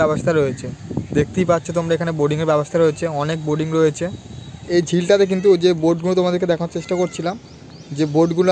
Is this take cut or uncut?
cut